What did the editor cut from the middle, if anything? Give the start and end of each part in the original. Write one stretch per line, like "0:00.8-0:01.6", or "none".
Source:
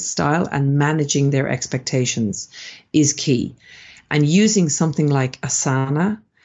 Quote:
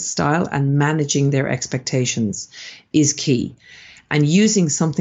none